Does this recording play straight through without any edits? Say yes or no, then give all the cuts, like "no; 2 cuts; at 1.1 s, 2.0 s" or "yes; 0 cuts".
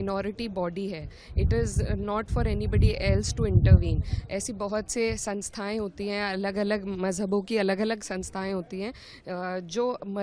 yes; 0 cuts